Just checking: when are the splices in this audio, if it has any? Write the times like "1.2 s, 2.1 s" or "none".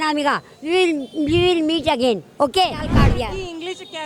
3.0 s